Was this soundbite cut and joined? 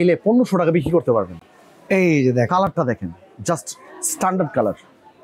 no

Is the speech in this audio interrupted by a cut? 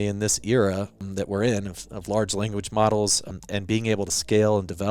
yes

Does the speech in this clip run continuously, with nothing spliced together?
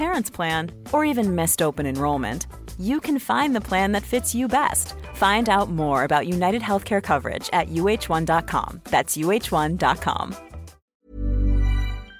no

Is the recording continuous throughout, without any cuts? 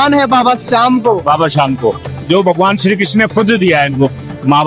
yes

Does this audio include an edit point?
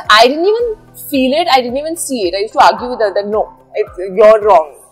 no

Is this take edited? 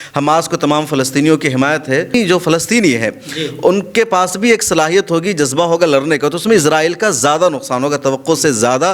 yes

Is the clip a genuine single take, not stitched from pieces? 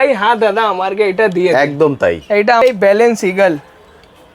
no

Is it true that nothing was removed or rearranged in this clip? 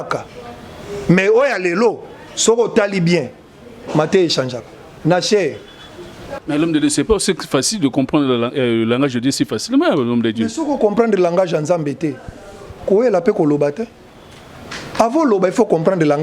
no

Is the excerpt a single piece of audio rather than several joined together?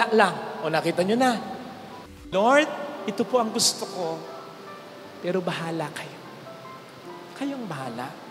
no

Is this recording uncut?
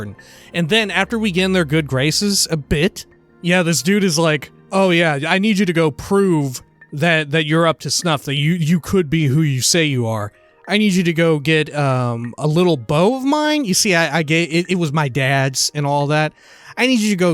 no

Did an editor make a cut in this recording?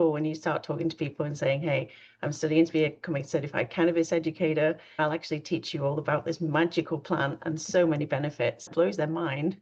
yes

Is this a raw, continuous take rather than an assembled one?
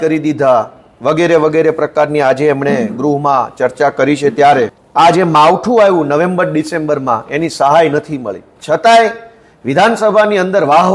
no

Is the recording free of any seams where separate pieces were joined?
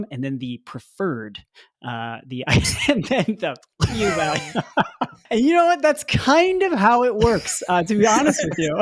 no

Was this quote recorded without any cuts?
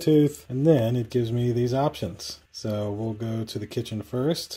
yes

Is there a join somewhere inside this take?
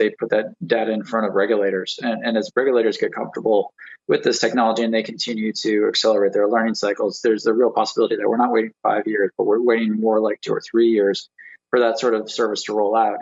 no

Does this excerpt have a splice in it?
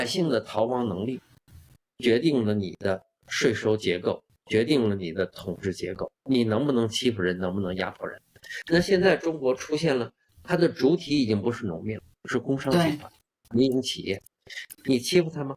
no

